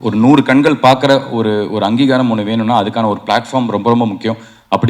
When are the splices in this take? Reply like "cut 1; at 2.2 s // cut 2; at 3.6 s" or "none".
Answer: none